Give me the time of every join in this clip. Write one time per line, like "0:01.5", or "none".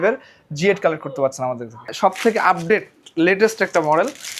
0:01.9